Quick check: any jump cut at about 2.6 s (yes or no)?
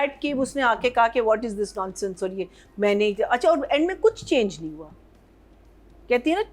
no